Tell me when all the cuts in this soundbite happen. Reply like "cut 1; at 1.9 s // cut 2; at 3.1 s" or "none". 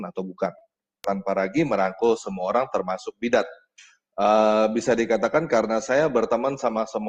cut 1; at 1.0 s